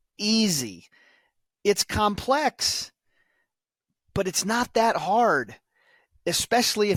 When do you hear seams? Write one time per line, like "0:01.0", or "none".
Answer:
none